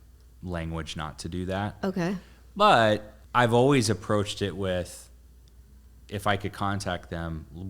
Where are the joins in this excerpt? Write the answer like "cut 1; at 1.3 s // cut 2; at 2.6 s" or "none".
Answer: cut 1; at 3.2 s